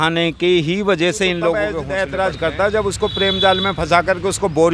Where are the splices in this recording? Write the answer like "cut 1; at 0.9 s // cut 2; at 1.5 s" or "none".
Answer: cut 1; at 1.8 s